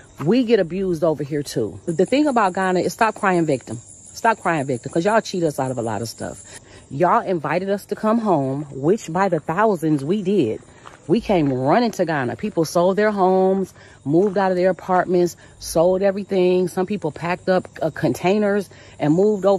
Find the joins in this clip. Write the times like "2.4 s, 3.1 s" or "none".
none

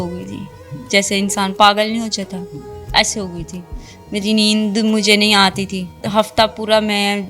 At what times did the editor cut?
6.0 s

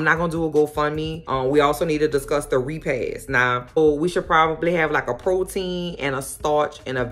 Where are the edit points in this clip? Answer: 1.3 s, 3.8 s

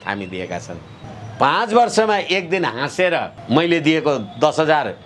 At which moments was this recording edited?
1.1 s, 3.4 s

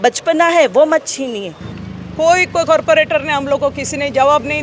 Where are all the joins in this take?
1.7 s

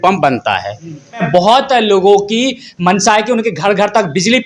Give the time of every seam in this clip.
1.3 s

